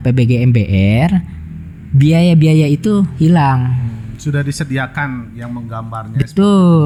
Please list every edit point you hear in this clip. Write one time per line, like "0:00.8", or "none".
none